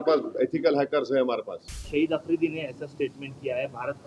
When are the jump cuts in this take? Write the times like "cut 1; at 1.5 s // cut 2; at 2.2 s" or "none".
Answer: cut 1; at 1.7 s